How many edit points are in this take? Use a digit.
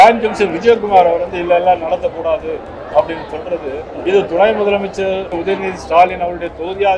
2